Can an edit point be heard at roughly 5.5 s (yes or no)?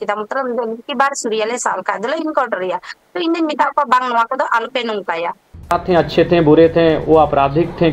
yes